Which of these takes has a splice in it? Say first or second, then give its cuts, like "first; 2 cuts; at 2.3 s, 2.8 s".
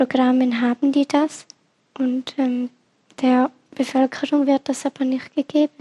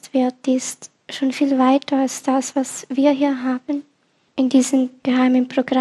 second; 1 cut; at 4.2 s